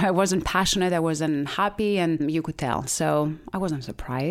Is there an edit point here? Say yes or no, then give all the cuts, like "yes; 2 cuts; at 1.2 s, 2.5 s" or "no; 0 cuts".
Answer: no; 0 cuts